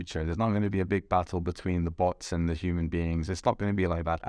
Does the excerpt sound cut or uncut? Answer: uncut